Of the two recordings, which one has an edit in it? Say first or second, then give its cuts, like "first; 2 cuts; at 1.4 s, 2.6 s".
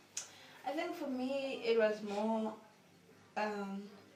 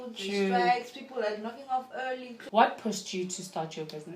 second; 1 cut; at 2.3 s